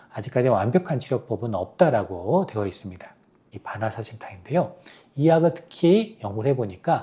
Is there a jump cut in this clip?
yes; 1 cut; at 3.5 s

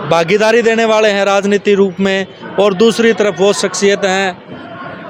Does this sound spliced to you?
no; 0 cuts

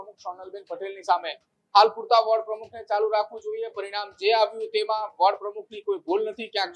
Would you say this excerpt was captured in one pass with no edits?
yes; 0 cuts

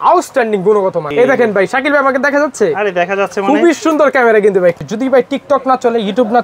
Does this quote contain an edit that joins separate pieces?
yes; 2 cuts; at 1.1 s, 4.8 s

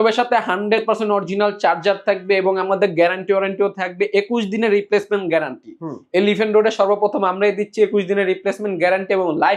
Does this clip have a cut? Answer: no; 0 cuts

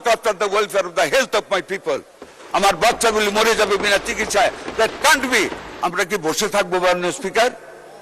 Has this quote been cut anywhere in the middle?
yes; 1 cut; at 5.6 s

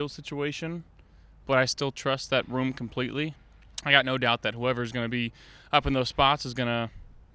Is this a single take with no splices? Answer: no; 1 cut; at 3.5 s

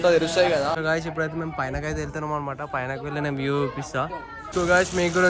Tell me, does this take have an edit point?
yes; 2 cuts; at 0.8 s, 4.4 s

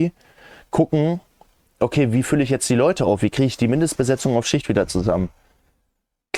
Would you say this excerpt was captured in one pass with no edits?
yes; 0 cuts

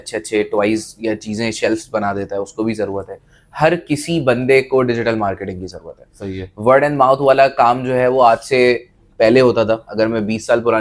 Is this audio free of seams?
yes; 0 cuts

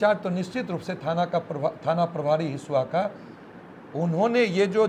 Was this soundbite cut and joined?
no; 0 cuts

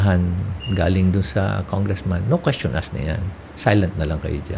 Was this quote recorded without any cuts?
yes; 0 cuts

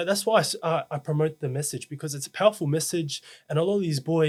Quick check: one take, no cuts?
yes; 0 cuts

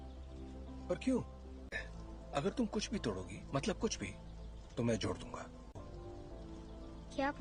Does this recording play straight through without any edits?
yes; 0 cuts

